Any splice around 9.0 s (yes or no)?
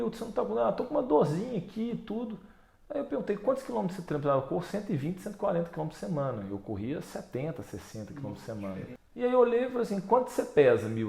yes